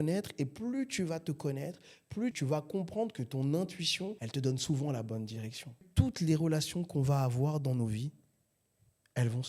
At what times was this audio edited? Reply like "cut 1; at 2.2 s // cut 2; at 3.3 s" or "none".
cut 1; at 2.4 s // cut 2; at 5.8 s